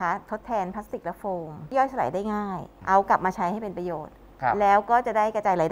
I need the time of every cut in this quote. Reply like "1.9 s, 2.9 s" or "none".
1.7 s, 2.7 s